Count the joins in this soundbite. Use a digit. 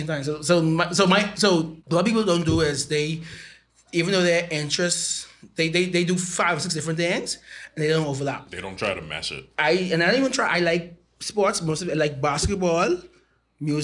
1